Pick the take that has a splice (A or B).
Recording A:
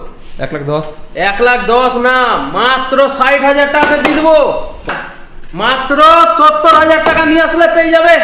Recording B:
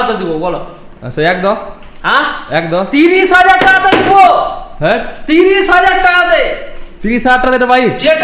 A